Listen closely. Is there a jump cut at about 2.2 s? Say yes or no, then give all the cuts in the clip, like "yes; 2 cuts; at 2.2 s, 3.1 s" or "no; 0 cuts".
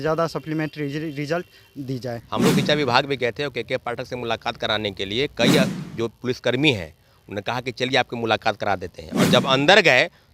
yes; 1 cut; at 2.2 s